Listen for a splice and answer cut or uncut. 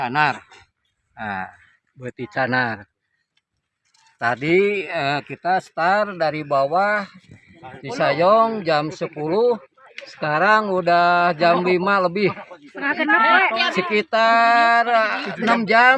uncut